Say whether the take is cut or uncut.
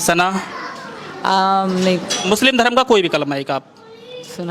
cut